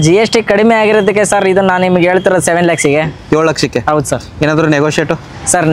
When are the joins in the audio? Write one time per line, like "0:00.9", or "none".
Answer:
none